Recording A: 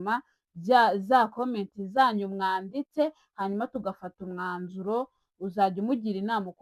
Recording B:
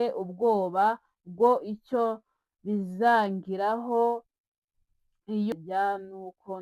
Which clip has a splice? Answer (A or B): B